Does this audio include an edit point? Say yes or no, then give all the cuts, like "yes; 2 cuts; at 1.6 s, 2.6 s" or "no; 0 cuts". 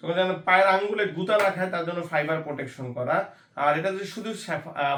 no; 0 cuts